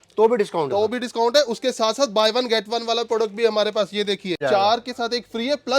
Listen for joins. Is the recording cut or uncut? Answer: cut